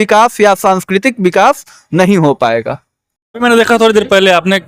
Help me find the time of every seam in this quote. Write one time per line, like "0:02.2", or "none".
0:03.3